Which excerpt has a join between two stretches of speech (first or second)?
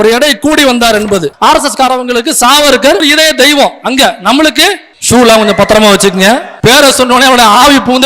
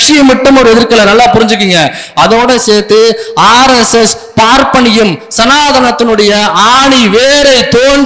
first